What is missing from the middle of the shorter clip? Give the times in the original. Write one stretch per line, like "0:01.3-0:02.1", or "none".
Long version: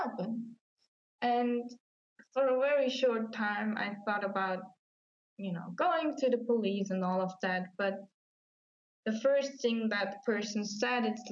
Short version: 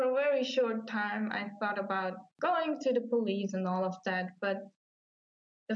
0:04.8-0:05.7

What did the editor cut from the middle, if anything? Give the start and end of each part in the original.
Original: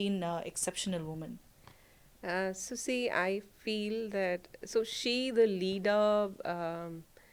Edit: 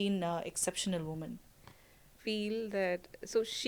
0:02.1-0:03.5

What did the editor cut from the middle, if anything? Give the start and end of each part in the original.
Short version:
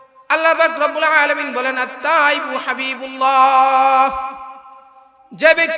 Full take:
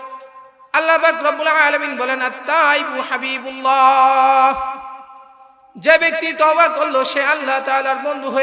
none

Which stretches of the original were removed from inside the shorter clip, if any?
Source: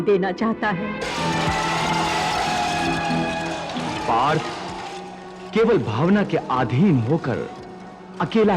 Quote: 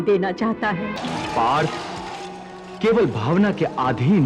0:01.0-0:03.7

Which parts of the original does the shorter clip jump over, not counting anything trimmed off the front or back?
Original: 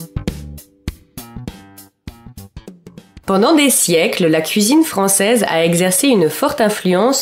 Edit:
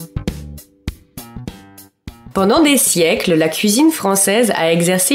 0:02.2-0:03.2

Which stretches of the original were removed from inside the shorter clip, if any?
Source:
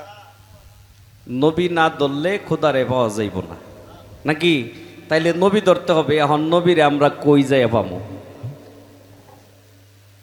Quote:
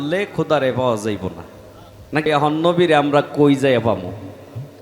0:04.4-0:06.1

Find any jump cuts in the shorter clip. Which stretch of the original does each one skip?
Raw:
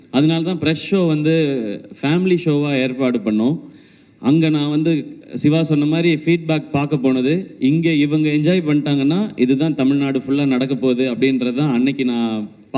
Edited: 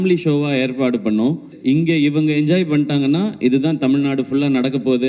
0:03.7-0:07.5

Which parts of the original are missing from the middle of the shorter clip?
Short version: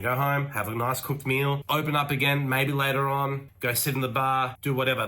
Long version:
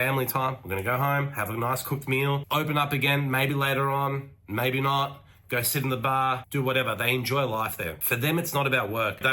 0:04.3-0:05.4

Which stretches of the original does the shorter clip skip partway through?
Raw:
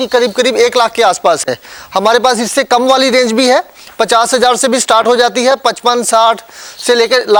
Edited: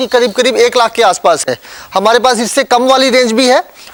none

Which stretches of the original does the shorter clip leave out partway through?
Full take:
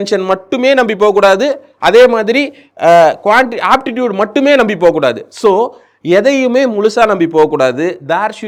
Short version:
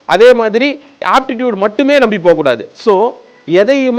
0:02.7-0:03.5

